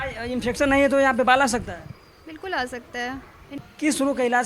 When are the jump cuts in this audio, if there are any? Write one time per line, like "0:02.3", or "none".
0:03.5